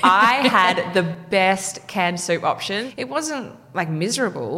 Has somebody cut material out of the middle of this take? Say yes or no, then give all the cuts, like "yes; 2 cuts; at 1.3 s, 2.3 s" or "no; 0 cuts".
yes; 1 cut; at 2.8 s